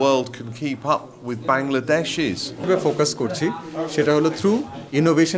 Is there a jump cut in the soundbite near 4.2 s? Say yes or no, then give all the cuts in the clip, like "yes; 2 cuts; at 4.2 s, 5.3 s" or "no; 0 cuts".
no; 1 cut; at 2.7 s